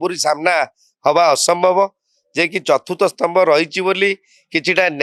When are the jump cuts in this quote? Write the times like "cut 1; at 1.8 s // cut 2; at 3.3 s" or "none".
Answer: none